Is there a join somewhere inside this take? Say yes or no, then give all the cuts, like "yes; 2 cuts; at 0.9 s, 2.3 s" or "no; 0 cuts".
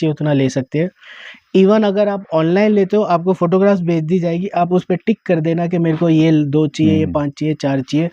no; 0 cuts